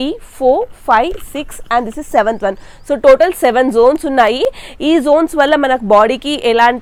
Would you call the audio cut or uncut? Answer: uncut